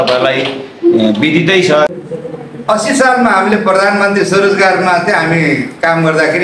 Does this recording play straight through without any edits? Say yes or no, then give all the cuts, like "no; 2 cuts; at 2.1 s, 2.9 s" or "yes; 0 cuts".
no; 1 cut; at 1.9 s